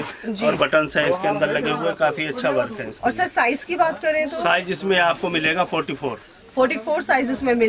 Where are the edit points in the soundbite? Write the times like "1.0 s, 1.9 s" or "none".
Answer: none